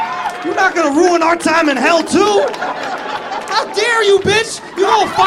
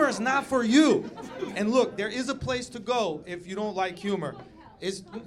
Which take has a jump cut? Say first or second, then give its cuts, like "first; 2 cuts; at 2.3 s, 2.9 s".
second; 1 cut; at 1.5 s